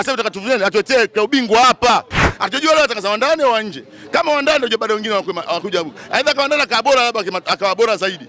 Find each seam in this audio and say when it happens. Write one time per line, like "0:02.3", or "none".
0:02.2